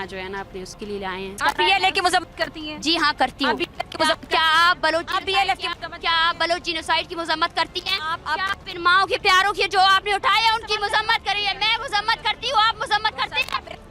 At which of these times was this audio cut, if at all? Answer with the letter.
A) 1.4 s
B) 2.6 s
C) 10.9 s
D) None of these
A